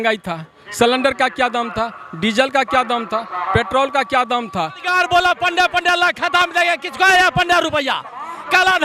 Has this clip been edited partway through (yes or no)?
yes